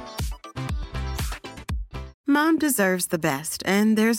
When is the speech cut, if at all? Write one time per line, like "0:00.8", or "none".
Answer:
0:02.1